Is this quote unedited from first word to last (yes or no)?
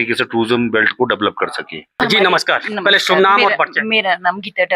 no